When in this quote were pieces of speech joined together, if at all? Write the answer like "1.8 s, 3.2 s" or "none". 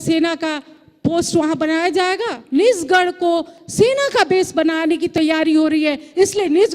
2.4 s